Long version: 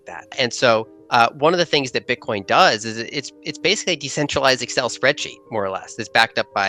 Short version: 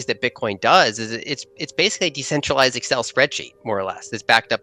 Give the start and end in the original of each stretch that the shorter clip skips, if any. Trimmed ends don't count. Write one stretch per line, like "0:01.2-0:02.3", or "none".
none